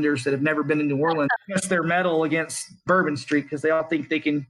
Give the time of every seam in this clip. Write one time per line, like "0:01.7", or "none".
0:01.3
0:02.8